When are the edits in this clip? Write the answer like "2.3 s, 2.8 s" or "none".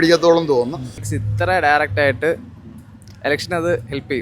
1.0 s